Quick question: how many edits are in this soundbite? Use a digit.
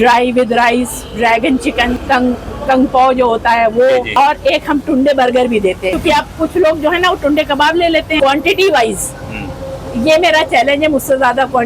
4